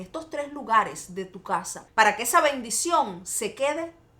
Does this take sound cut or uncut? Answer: cut